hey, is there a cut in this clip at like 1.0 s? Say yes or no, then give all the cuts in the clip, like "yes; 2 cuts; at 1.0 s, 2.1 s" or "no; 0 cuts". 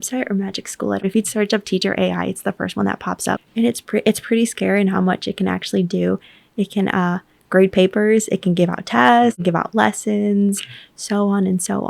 yes; 3 cuts; at 1.0 s, 3.4 s, 9.4 s